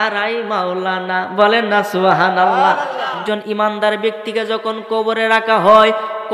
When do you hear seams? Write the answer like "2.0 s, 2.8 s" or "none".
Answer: 3.2 s

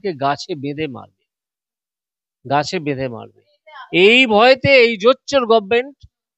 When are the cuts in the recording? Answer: none

